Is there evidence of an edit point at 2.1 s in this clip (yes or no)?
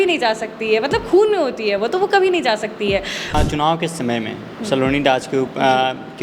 no